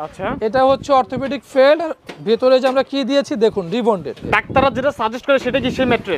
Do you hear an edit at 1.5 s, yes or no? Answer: no